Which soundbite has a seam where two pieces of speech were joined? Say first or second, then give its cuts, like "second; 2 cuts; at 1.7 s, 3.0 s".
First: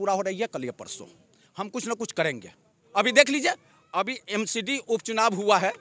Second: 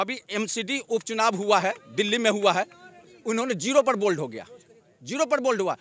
first; 1 cut; at 2.8 s